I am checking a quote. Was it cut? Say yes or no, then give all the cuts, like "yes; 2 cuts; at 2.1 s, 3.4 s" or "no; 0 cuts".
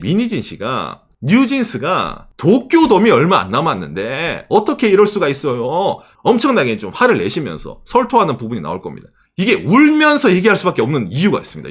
yes; 3 cuts; at 1.0 s, 6.1 s, 9.2 s